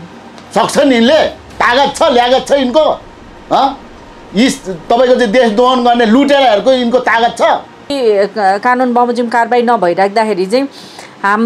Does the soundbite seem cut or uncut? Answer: cut